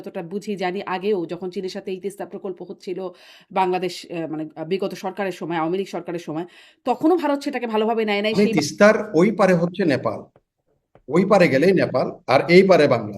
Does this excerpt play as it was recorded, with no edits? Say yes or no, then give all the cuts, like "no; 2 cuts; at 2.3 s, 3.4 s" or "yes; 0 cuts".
no; 1 cut; at 8.3 s